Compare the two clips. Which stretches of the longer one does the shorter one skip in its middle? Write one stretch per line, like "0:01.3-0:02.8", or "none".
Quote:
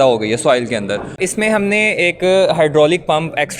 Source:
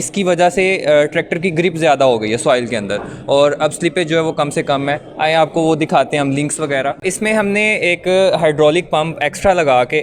0:03.2-0:07.0